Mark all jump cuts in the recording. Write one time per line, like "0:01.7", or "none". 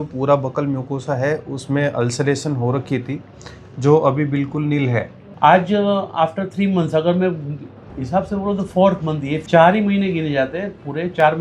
0:05.2
0:09.4